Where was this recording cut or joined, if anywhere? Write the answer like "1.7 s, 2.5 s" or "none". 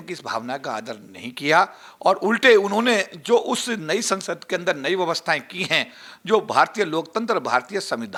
none